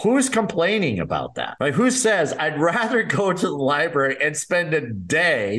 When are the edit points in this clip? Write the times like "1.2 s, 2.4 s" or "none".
1.4 s